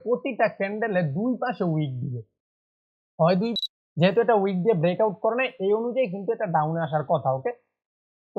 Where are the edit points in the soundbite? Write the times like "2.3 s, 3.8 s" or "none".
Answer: 3.5 s